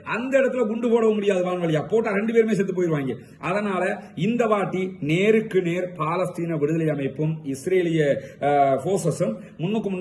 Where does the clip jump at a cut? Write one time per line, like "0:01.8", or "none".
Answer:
none